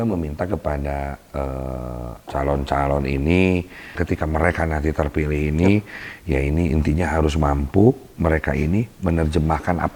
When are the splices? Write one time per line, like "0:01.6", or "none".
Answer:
0:02.2
0:04.0